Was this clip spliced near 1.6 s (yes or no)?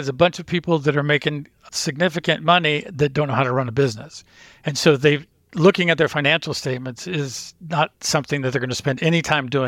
yes